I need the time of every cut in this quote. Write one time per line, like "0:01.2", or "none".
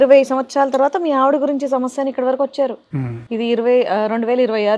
none